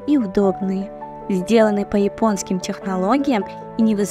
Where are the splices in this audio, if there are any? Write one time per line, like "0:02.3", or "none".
none

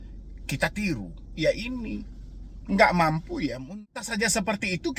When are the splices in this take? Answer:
0:03.7

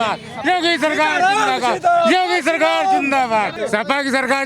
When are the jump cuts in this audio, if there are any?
0:03.6

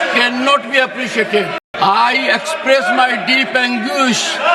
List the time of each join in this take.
0:01.7

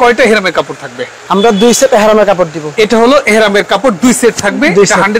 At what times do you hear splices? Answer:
0:02.7

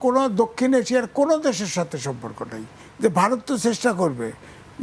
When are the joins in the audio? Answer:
0:02.8

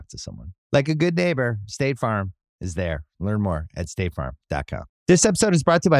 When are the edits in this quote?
0:04.9

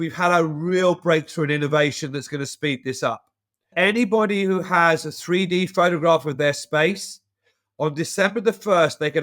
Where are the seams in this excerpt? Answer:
0:03.7

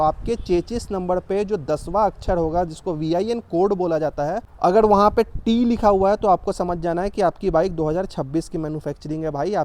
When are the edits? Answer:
none

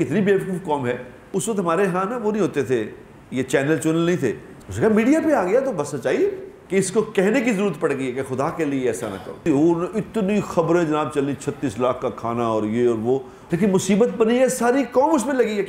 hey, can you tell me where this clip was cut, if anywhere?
0:01.1
0:04.5
0:06.5
0:09.4
0:13.4

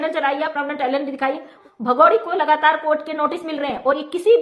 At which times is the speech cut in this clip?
0:01.6

